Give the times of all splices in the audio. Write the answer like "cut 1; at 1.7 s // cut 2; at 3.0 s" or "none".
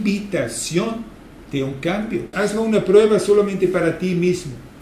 cut 1; at 2.3 s